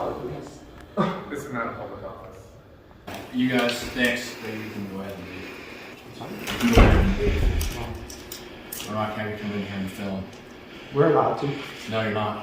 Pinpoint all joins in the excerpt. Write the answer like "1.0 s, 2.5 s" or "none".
3.2 s